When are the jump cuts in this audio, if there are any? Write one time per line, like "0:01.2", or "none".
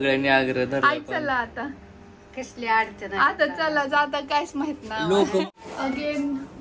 0:05.4